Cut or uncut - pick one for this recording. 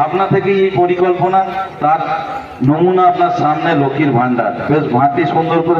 uncut